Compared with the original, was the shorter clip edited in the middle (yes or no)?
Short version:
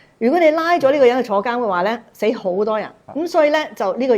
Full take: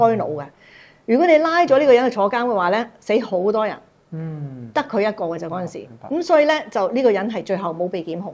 yes